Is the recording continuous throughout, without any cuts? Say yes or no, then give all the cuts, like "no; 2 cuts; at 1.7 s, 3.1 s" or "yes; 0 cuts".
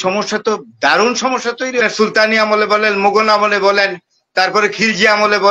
no; 1 cut; at 1.8 s